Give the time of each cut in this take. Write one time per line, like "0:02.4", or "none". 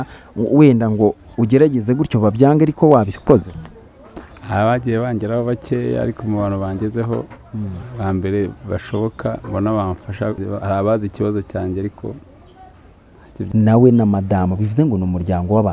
0:10.4
0:13.3